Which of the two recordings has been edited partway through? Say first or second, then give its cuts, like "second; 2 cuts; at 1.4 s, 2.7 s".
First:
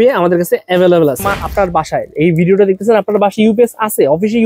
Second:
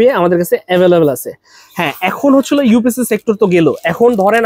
first; 1 cut; at 1.3 s